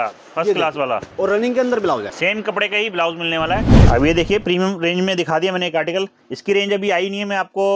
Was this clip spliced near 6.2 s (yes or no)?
no